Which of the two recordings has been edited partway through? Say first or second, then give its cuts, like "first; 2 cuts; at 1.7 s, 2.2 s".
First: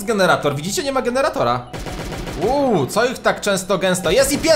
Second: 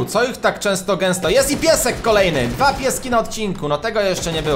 first; 1 cut; at 1.7 s